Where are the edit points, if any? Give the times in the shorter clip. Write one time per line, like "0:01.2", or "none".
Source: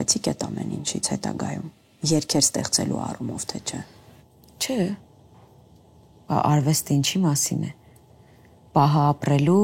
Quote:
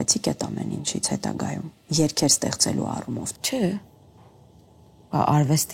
0:01.7
0:03.3